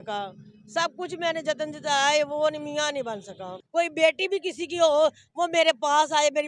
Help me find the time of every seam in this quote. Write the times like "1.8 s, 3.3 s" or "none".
3.6 s